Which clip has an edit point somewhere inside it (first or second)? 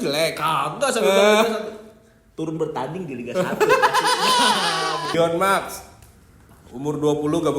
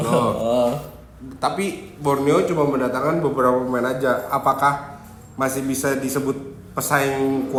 first